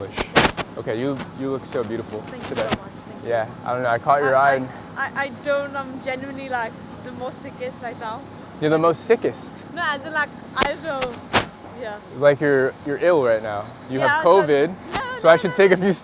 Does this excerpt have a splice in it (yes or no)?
no